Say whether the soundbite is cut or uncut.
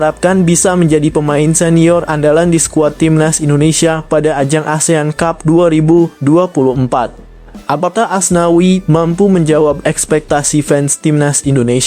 uncut